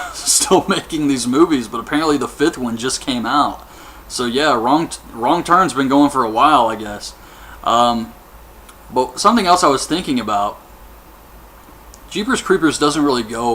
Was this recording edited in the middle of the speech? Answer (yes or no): yes